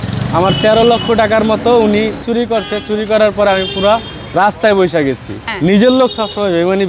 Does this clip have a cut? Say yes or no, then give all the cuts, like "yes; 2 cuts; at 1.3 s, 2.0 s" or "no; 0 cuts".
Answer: no; 0 cuts